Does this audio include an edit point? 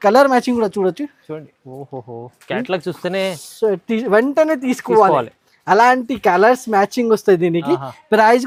no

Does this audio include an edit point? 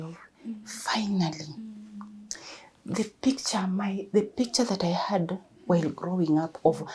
no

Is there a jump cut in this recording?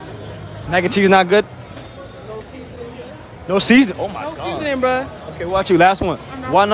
no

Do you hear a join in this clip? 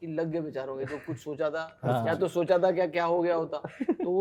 no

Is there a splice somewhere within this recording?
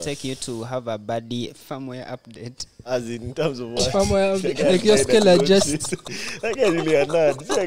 yes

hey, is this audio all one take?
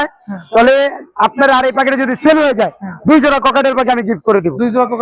yes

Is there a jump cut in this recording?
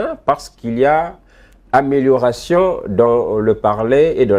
no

